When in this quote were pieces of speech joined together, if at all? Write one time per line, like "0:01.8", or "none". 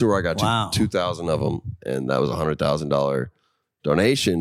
none